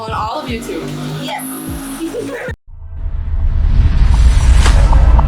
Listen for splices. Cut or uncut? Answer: uncut